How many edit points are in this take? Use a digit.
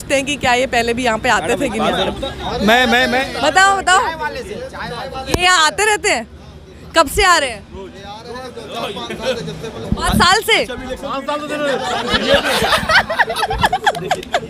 0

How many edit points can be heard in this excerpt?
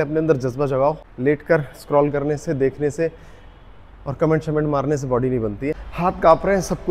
2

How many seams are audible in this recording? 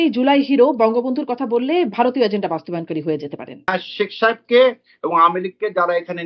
1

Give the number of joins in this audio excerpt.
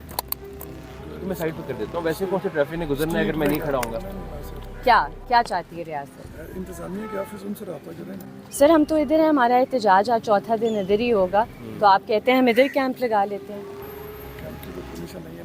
1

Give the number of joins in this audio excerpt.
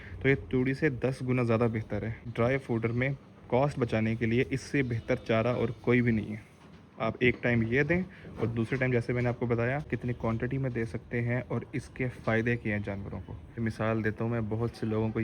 3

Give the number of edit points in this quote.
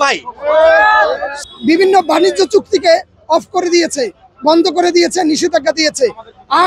0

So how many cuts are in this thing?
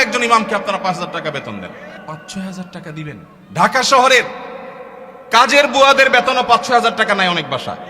2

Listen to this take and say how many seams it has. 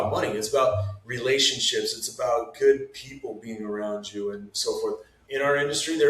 2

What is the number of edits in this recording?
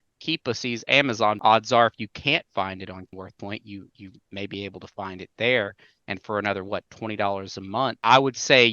3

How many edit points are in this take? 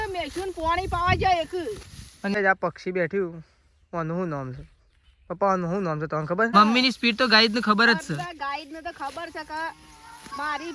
2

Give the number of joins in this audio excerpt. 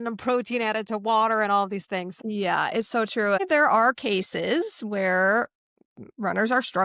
2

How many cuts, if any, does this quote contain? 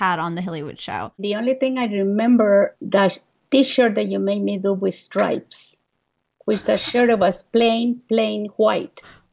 2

